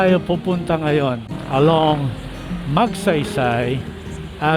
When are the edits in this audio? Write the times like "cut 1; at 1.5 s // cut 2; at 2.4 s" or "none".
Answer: cut 1; at 1.3 s